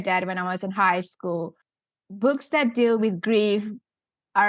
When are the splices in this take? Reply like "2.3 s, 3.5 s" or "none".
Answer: 1.9 s